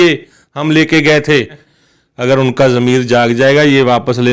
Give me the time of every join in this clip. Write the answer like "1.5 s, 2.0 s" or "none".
1.7 s